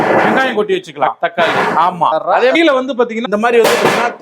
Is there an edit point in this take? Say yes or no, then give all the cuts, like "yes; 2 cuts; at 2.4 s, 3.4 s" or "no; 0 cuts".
yes; 1 cut; at 1.1 s